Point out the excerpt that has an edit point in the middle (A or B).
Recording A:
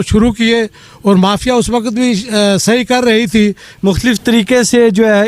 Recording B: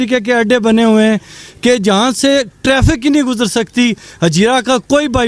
A